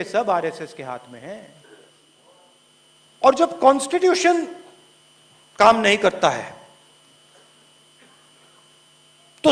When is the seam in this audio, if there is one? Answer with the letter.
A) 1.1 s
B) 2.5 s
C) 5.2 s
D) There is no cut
B